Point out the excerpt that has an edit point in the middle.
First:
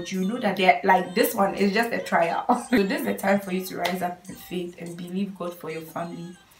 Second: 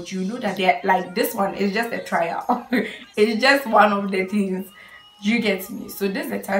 first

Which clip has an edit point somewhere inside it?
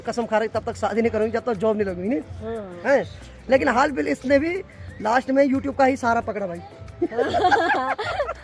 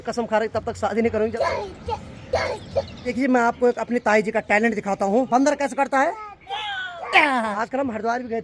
second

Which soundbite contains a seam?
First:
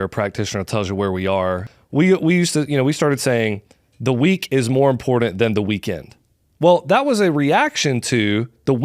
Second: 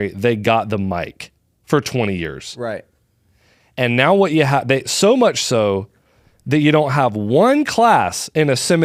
first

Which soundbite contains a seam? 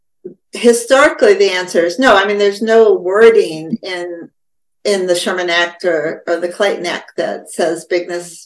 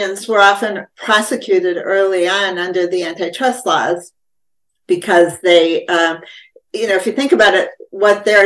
first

